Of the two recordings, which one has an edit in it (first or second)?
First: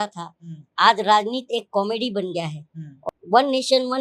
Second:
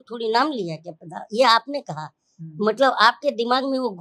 first